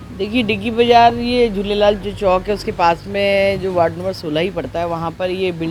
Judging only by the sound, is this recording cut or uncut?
uncut